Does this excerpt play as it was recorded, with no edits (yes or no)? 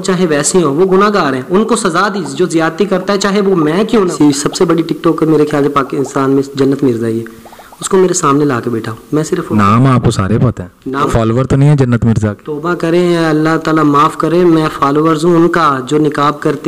no